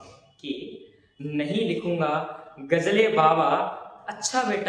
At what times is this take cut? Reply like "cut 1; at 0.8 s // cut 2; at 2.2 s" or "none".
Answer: none

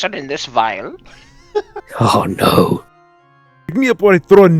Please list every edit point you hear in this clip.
cut 1; at 3.4 s

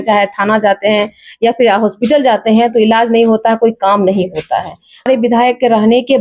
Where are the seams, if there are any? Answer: cut 1; at 5.1 s

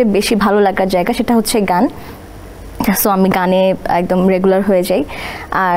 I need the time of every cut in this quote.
none

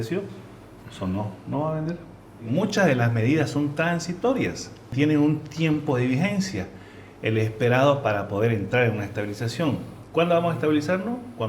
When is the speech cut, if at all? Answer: cut 1; at 2.5 s // cut 2; at 4.9 s

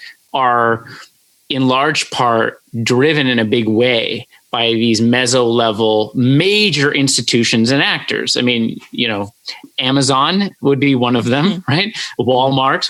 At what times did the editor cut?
none

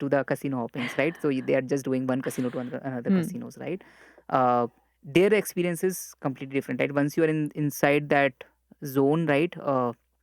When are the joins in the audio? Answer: none

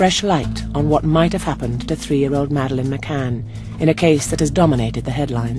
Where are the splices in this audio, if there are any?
cut 1; at 2.1 s

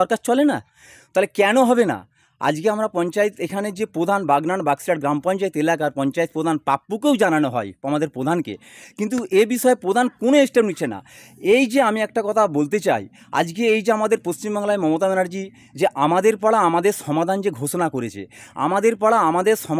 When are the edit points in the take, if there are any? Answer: none

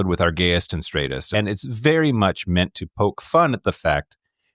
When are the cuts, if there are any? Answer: cut 1; at 1.2 s

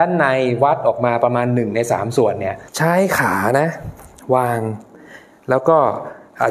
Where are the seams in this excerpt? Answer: cut 1; at 2.6 s

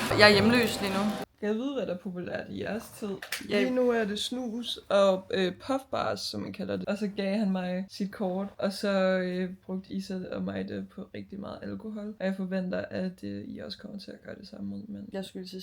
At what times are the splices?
cut 1; at 1.3 s // cut 2; at 6.8 s

